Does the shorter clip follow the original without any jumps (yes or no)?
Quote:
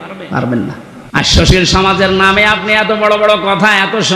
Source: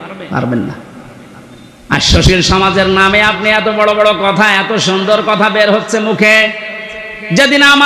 no